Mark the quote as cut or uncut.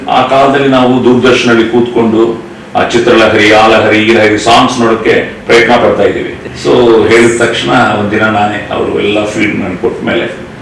cut